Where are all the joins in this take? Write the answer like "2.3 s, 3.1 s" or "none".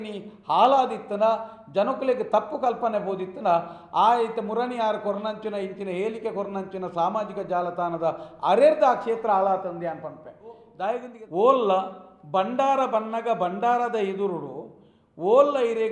11.1 s